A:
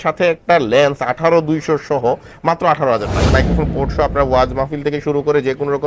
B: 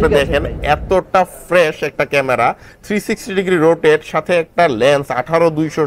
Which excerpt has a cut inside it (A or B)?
A